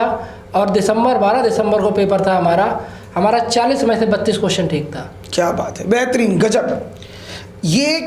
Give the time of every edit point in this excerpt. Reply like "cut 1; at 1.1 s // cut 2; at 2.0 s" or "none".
none